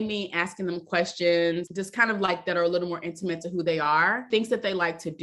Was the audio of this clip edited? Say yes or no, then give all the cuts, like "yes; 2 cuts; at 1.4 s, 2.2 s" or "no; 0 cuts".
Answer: yes; 2 cuts; at 1.7 s, 4.2 s